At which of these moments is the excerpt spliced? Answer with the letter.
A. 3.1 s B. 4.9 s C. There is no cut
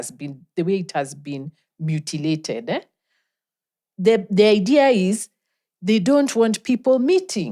C